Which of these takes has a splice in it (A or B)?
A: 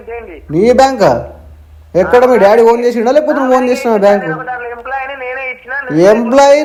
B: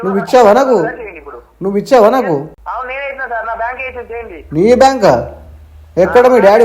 B